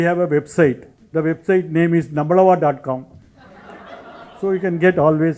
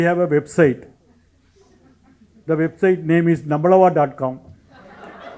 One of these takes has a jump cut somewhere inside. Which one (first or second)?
first